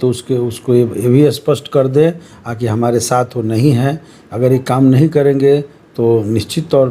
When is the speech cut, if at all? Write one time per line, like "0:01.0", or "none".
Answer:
none